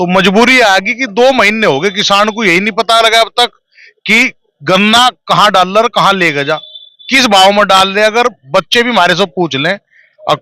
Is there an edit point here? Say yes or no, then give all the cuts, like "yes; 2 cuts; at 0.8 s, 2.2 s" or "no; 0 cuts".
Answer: no; 0 cuts